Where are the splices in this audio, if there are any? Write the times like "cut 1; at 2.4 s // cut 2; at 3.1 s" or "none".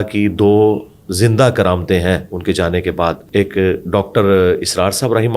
cut 1; at 3.2 s